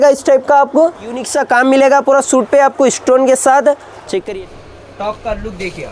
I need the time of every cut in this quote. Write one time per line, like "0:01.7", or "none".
0:01.3
0:04.2